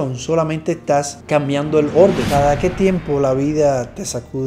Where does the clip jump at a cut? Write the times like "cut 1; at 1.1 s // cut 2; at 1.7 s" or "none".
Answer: cut 1; at 2.2 s